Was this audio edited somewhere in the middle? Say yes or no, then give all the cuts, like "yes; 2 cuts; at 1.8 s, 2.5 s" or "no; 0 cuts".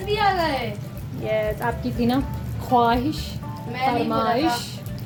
no; 0 cuts